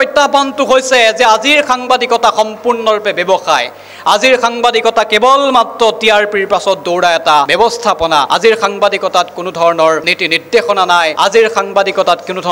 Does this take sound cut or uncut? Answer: uncut